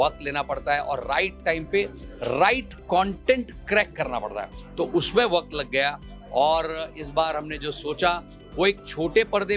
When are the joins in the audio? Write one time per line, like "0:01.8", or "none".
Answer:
none